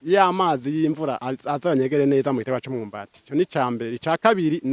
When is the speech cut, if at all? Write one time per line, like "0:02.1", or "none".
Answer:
0:01.3